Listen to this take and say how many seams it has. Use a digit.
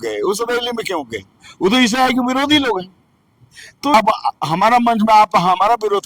1